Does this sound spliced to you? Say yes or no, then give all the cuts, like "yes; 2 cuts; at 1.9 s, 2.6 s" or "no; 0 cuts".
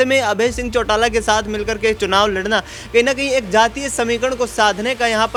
no; 0 cuts